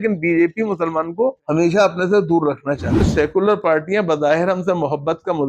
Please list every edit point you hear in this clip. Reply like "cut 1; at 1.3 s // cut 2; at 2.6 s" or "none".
cut 1; at 1.4 s // cut 2; at 3.1 s